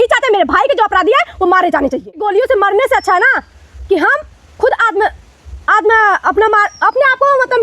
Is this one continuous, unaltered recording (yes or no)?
no